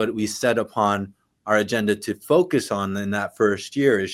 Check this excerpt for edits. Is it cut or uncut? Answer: uncut